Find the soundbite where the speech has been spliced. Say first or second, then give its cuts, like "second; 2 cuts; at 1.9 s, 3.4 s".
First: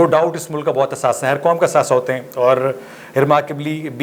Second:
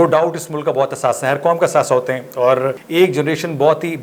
second; 1 cut; at 2.8 s